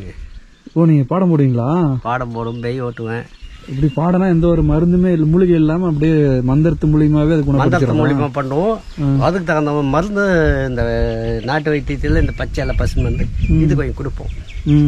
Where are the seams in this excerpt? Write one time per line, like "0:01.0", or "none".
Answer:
0:03.4